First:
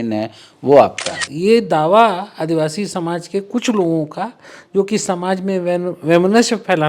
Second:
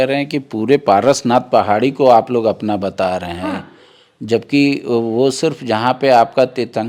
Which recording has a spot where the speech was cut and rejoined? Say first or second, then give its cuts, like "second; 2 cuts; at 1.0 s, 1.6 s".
first; 1 cut; at 1.3 s